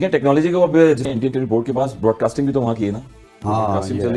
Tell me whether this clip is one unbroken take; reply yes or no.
no